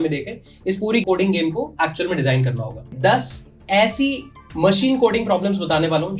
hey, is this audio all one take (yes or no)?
no